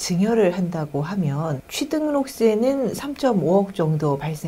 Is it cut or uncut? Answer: cut